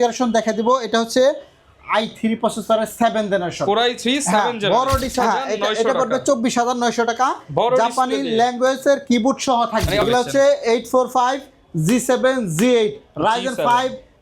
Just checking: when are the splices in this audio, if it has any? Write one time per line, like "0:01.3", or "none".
0:05.1
0:10.0